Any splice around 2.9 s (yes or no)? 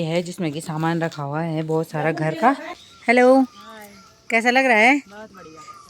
yes